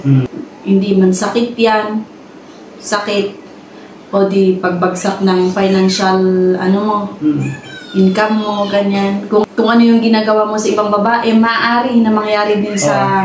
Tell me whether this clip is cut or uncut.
uncut